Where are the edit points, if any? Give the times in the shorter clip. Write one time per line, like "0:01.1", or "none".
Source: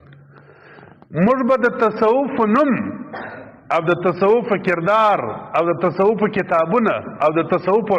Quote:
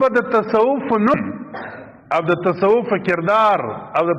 0:01.1